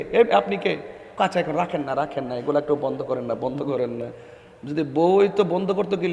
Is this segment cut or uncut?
uncut